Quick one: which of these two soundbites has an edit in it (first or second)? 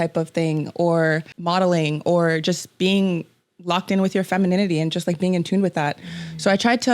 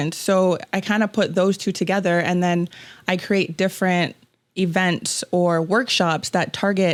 first